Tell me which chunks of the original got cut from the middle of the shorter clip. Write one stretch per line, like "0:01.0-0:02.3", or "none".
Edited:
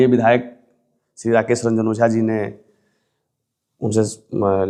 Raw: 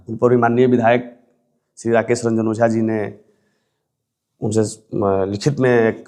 none